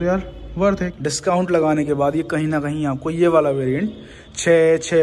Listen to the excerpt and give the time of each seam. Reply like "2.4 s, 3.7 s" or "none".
0.9 s